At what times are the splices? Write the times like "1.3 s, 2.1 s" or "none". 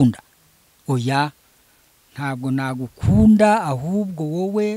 none